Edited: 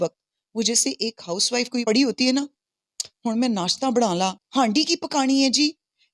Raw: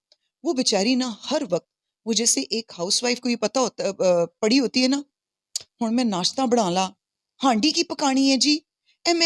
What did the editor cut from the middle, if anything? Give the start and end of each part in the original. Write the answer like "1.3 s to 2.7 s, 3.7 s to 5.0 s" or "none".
3.3 s to 4.4 s, 7.0 s to 7.3 s